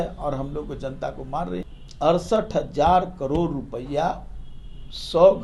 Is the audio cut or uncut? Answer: cut